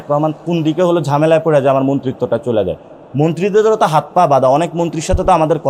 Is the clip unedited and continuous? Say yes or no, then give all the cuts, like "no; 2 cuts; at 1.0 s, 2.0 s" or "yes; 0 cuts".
yes; 0 cuts